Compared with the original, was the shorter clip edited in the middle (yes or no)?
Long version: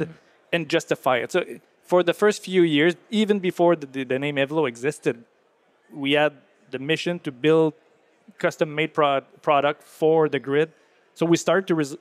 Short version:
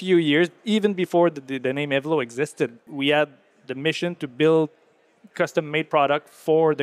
yes